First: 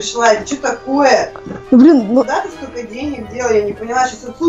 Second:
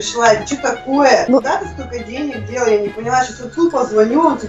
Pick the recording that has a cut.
second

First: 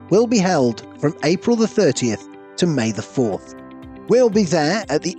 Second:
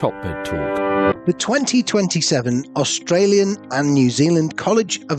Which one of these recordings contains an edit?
second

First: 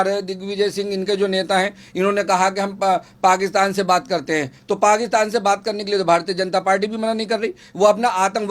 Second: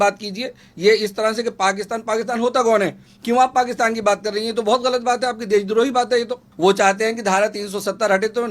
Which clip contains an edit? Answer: second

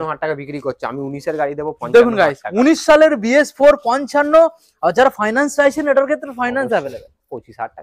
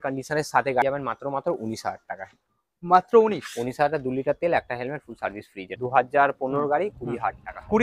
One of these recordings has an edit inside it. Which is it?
second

